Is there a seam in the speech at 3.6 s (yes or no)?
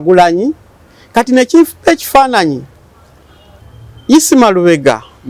yes